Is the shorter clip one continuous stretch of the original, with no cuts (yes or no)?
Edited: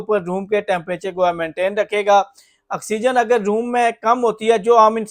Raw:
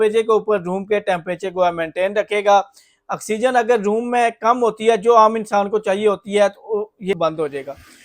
yes